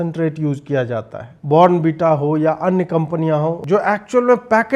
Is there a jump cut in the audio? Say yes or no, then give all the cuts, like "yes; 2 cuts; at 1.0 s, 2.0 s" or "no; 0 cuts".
yes; 2 cuts; at 1.3 s, 3.6 s